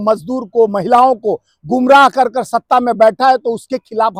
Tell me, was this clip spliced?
no; 0 cuts

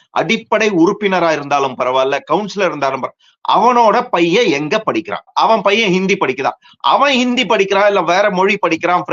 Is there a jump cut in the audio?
yes; 1 cut; at 5.3 s

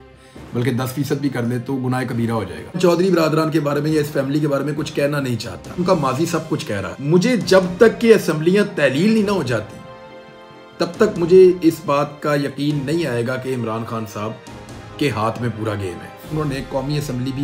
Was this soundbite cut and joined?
yes; 4 cuts; at 2.8 s, 5.8 s, 6.9 s, 16.3 s

